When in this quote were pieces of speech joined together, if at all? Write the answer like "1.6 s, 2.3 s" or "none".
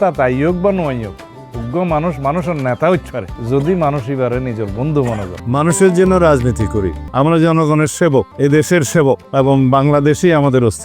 5.3 s, 7.0 s, 8.3 s, 9.2 s